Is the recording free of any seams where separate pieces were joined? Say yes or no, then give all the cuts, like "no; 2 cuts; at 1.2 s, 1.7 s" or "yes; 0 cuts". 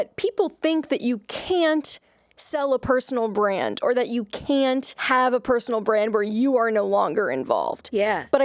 no; 1 cut; at 4.9 s